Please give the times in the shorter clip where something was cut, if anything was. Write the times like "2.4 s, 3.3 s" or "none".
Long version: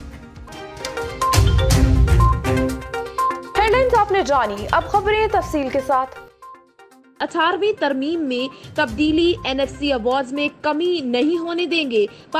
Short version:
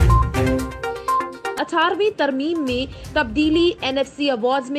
1.3 s